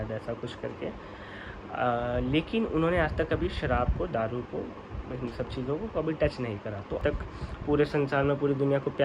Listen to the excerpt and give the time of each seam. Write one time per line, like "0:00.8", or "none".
0:07.0